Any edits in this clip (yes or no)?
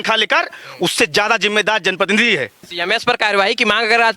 yes